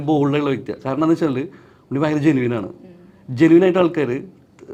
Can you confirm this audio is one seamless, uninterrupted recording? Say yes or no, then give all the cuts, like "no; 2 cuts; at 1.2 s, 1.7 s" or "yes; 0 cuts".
yes; 0 cuts